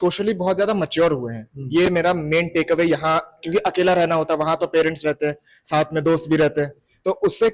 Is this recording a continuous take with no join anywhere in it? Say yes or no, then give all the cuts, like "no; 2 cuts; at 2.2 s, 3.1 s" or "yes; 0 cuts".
yes; 0 cuts